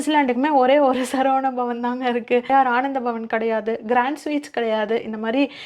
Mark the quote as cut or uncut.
cut